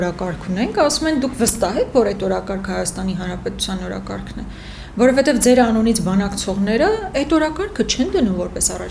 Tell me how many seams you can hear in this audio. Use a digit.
0